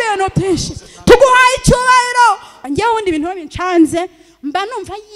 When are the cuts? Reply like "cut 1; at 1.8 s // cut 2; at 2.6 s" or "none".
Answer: cut 1; at 2.5 s

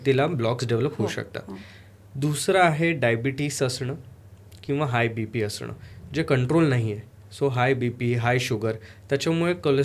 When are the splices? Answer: none

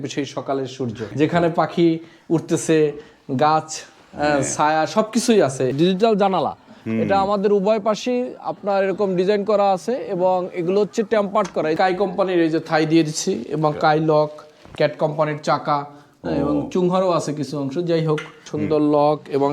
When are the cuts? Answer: cut 1; at 1.1 s // cut 2; at 5.7 s // cut 3; at 11.8 s // cut 4; at 18.4 s

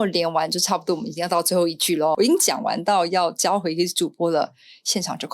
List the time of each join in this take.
cut 1; at 2.1 s

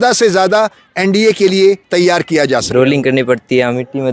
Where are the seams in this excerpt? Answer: cut 1; at 2.7 s

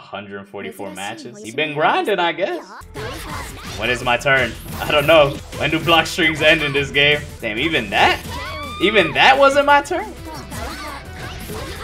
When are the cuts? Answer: cut 1; at 2.8 s // cut 2; at 5.5 s // cut 3; at 7.3 s // cut 4; at 10.1 s

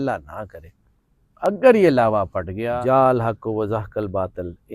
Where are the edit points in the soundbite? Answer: cut 1; at 2.6 s

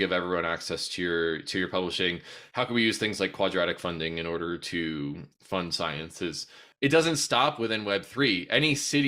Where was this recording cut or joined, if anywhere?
cut 1; at 6.6 s

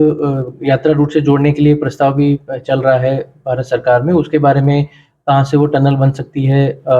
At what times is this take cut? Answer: none

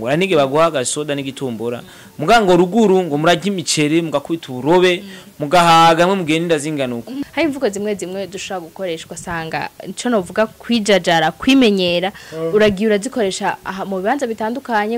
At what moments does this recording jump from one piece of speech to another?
cut 1; at 7.1 s

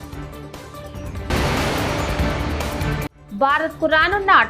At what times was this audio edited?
cut 1; at 1.3 s // cut 2; at 3.1 s

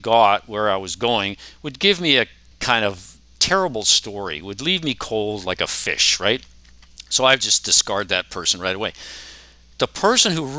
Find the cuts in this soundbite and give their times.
cut 1; at 2.5 s

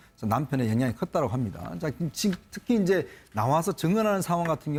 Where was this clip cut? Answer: none

